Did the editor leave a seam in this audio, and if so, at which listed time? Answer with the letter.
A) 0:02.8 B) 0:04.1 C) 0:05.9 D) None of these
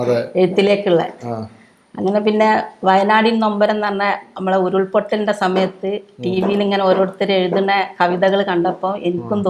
D